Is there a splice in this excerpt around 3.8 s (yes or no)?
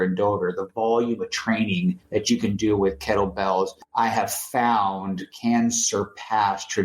yes